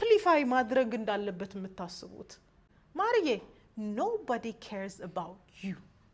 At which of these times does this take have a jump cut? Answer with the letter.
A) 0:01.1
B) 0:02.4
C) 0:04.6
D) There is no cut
B